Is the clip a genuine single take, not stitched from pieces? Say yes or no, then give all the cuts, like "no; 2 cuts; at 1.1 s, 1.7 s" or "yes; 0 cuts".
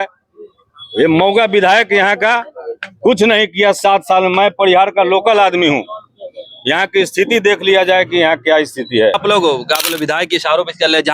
no; 1 cut; at 9.2 s